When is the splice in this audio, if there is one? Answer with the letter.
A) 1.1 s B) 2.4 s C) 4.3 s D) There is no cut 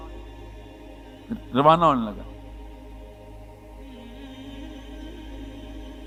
D